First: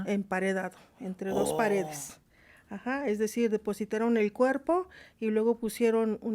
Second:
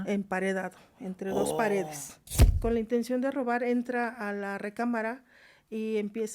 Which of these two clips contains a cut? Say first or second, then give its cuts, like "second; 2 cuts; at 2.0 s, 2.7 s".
second; 1 cut; at 2.5 s